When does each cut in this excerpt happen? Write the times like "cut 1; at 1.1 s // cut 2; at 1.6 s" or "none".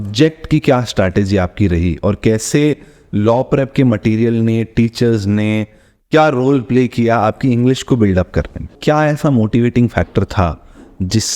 cut 1; at 8.7 s